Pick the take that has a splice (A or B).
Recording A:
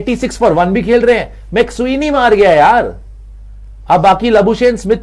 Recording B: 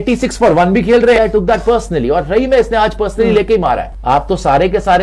B